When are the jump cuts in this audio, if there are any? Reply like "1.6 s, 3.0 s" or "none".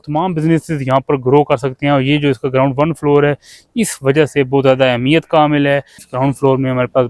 6.0 s